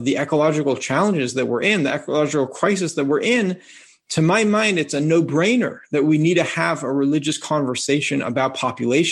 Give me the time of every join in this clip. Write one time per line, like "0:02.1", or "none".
none

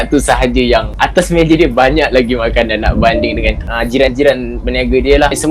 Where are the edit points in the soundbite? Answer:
0:01.0

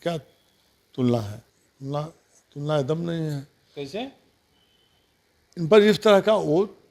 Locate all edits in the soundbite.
0:01.4

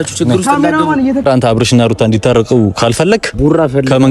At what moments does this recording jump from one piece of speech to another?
0:01.3

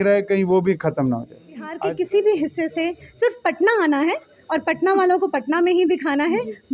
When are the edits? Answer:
0:01.8

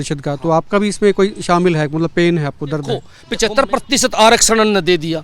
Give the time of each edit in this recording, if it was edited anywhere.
0:03.2

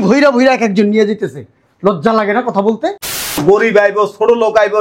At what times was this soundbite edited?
0:03.4

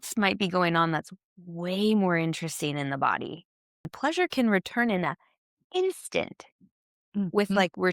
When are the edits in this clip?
0:03.8

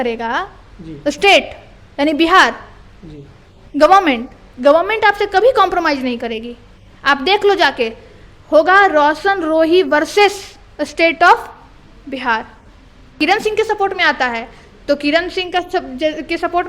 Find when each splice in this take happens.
0:13.2

